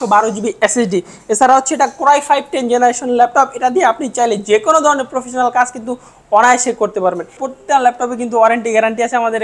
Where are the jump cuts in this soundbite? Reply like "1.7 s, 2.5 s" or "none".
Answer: 7.4 s